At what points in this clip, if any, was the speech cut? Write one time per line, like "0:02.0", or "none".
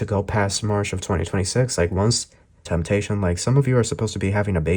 0:02.7